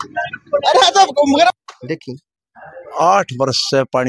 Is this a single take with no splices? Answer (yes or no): no